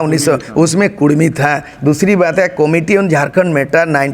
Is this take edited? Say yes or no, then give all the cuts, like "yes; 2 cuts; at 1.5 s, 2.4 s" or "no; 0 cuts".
no; 0 cuts